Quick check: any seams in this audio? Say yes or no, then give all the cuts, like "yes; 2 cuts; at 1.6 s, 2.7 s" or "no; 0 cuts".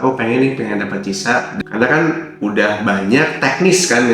yes; 1 cut; at 1.5 s